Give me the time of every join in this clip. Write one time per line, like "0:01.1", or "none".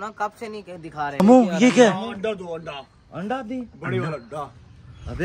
0:01.2